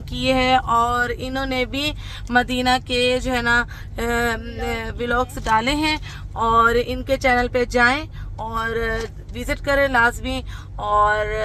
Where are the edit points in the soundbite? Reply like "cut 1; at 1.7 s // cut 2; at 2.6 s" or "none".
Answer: none